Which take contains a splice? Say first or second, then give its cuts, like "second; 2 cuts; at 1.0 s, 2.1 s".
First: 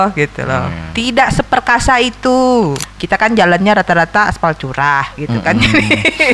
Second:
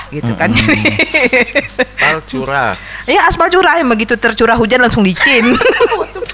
first; 1 cut; at 2.9 s